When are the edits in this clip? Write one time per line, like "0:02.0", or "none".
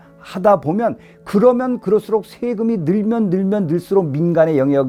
none